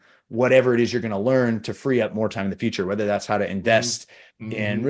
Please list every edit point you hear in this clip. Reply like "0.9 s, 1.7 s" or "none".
none

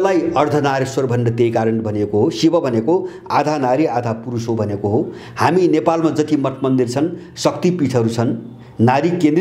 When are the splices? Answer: none

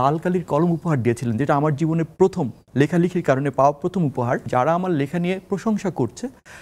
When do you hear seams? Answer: 4.5 s

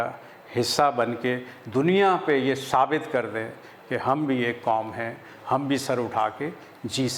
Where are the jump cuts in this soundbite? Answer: none

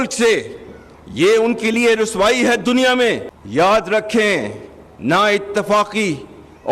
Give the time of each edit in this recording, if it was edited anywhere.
3.3 s

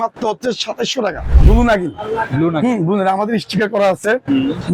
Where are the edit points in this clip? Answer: 1.3 s

